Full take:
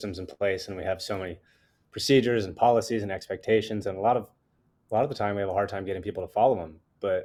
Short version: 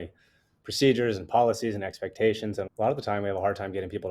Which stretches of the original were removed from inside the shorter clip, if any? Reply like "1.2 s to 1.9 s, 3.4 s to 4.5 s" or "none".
3.9 s to 4.8 s